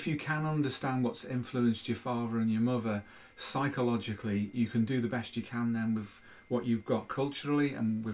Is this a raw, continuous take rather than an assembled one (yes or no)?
yes